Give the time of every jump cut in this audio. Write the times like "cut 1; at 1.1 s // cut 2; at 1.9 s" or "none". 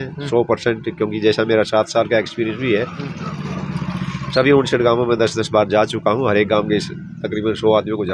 none